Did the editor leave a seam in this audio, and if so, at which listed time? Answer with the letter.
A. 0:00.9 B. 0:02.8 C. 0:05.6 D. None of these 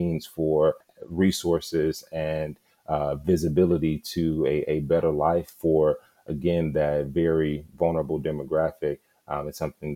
A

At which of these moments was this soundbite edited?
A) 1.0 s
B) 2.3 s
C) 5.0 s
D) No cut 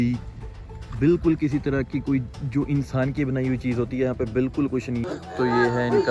C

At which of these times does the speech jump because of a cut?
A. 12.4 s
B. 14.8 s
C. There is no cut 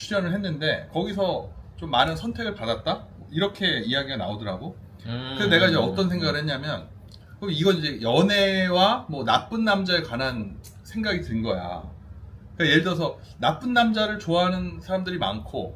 C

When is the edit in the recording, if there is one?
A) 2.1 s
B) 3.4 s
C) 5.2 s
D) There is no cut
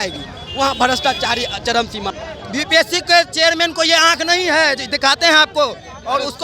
A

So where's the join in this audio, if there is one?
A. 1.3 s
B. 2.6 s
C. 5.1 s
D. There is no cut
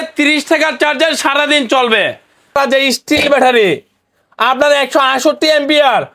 B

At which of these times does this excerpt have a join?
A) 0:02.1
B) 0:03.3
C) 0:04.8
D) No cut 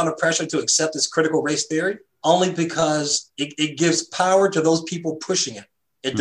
A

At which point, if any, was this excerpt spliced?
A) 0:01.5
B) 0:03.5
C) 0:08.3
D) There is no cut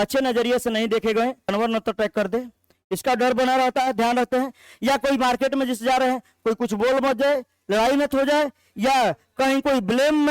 A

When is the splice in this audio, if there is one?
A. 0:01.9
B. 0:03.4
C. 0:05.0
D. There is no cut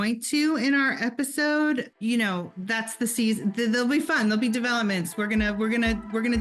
A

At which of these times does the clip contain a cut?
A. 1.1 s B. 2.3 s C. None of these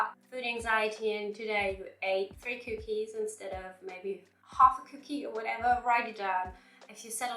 B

